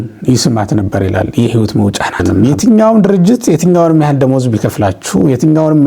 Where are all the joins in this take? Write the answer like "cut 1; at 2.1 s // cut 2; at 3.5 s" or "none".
cut 1; at 2.2 s